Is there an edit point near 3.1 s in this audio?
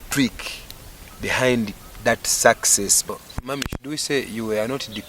yes; 1 cut; at 3.1 s

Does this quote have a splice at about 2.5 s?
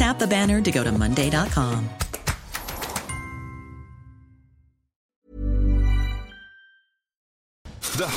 no; 2 cuts; at 5.1 s, 7.5 s

